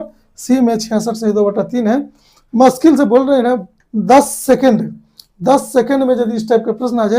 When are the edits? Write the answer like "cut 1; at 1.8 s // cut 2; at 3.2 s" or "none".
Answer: cut 1; at 3.7 s